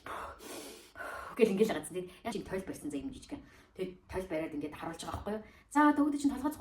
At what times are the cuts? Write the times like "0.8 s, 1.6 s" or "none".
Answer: 2.3 s